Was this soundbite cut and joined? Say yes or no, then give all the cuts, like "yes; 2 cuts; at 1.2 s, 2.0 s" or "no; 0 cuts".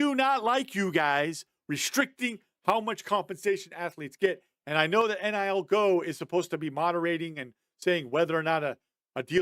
no; 0 cuts